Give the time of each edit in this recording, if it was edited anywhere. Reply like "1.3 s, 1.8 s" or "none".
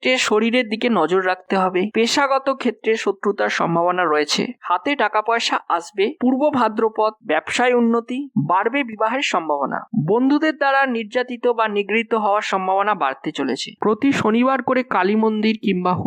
4.6 s, 6.2 s, 13.7 s